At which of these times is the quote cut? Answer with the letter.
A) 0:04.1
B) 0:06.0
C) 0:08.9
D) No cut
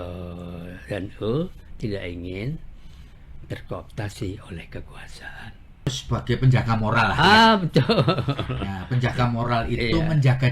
B